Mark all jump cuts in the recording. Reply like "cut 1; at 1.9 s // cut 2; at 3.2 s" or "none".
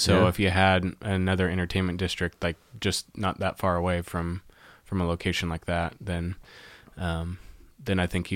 none